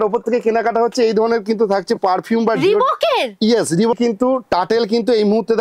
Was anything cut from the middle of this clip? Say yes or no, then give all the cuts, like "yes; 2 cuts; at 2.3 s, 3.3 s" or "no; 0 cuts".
yes; 1 cut; at 3.9 s